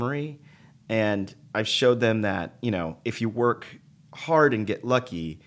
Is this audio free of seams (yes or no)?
yes